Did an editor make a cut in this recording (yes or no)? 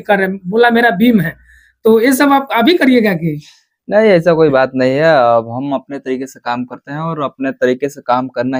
no